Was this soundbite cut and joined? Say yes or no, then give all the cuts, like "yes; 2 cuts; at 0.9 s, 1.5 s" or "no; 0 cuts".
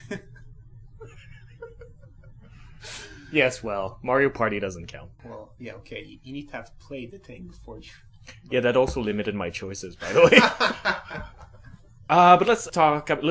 yes; 1 cut; at 1.1 s